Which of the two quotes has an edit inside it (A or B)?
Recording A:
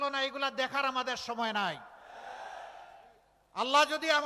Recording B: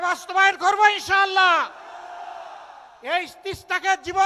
A